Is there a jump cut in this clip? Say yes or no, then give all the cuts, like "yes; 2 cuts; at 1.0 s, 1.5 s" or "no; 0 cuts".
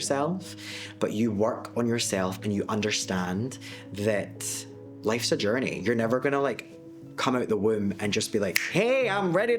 no; 0 cuts